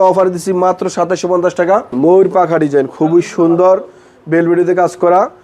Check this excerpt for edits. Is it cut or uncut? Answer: cut